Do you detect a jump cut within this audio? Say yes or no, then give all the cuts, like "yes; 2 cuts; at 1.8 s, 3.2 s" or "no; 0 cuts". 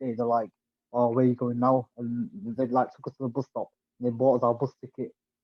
no; 0 cuts